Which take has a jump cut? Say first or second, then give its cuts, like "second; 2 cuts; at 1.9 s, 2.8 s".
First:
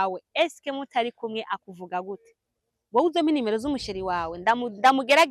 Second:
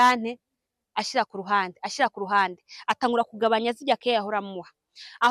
first; 1 cut; at 2.7 s